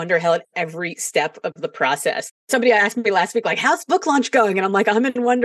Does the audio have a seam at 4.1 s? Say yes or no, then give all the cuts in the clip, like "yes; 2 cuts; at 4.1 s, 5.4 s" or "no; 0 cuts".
no; 1 cut; at 2.4 s